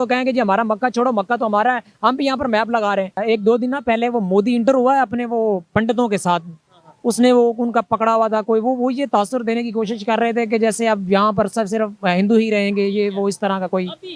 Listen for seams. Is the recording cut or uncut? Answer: cut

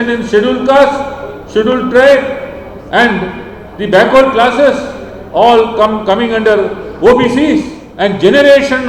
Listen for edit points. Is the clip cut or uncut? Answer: cut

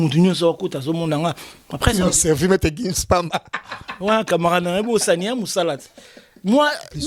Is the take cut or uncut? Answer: uncut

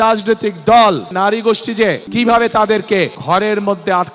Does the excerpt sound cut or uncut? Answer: cut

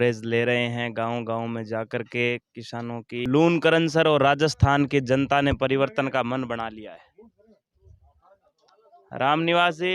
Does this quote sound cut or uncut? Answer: cut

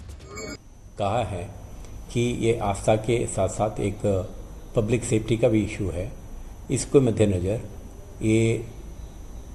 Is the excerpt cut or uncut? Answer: uncut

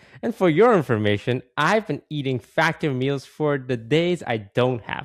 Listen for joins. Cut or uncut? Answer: uncut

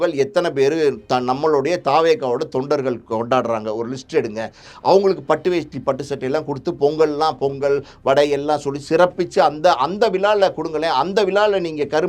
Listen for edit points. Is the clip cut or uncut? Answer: cut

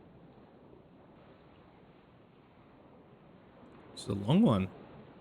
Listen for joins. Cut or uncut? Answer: cut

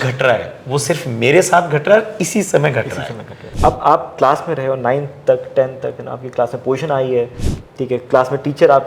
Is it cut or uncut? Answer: cut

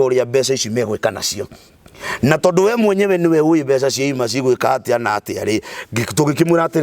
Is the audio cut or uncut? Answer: uncut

